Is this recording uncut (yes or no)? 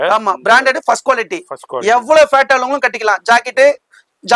yes